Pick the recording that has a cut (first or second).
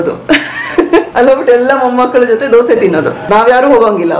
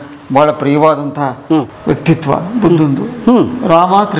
first